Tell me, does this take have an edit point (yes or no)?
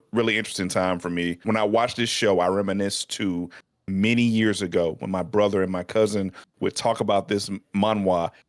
yes